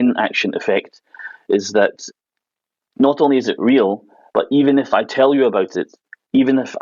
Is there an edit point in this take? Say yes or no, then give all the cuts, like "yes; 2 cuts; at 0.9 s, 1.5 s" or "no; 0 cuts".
no; 0 cuts